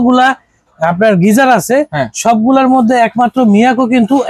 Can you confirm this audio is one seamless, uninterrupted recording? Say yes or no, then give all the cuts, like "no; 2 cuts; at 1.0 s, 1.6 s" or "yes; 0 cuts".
yes; 0 cuts